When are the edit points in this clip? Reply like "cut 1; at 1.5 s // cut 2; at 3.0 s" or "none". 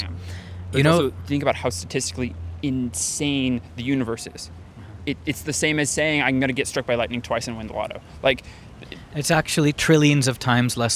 none